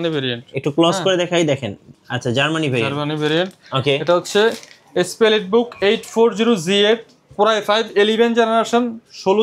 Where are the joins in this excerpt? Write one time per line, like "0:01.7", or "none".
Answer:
none